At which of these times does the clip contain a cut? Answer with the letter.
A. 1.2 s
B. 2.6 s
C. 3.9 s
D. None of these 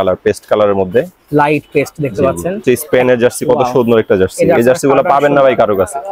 B